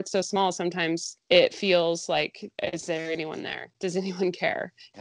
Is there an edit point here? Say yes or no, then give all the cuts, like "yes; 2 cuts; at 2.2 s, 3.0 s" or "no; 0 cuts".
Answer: yes; 2 cuts; at 1.1 s, 2.4 s